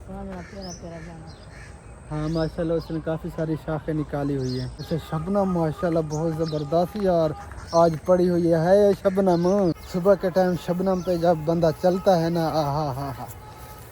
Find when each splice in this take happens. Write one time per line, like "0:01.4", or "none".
0:04.8
0:09.8